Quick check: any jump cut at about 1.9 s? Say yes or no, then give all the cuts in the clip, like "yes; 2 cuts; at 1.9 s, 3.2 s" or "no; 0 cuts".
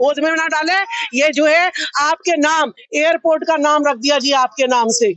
no; 0 cuts